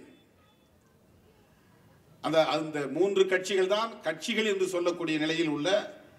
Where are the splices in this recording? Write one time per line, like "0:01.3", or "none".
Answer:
none